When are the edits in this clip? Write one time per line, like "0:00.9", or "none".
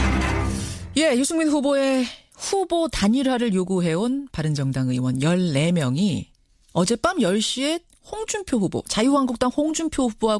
none